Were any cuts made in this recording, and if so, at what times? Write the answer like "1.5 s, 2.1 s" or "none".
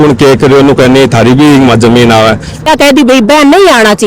2.7 s